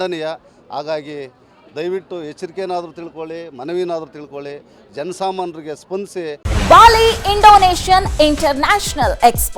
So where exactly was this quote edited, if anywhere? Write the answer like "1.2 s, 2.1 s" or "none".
6.5 s